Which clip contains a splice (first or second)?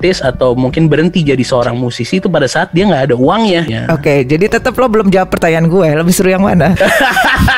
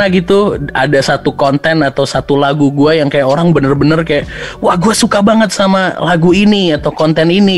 first